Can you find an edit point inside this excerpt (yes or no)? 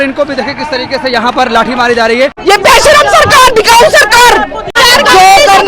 yes